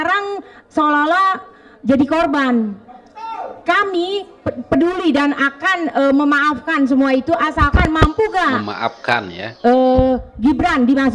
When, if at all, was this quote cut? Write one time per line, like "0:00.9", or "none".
none